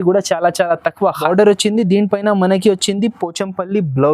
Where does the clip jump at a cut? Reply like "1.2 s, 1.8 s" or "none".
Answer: 1.2 s